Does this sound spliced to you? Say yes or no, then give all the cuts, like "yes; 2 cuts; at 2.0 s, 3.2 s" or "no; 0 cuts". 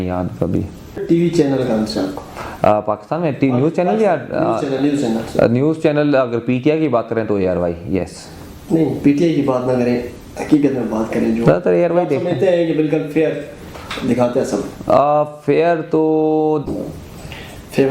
yes; 2 cuts; at 1.0 s, 16.7 s